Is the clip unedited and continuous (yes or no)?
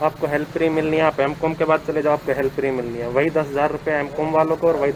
yes